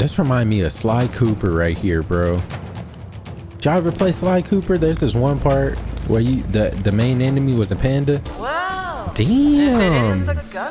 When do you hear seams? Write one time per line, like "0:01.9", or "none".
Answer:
0:08.3